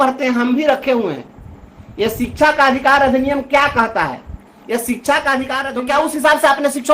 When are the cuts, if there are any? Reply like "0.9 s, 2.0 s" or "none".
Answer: 5.6 s